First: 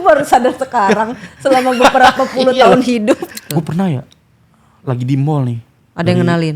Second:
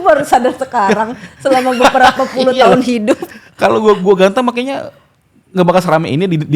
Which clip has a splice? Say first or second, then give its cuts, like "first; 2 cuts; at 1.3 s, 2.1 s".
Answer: first; 1 cut; at 3.4 s